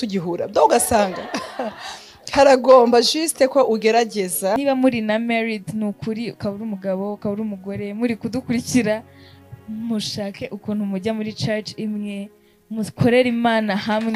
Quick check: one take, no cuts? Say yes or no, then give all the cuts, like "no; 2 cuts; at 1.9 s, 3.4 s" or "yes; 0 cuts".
no; 1 cut; at 4.6 s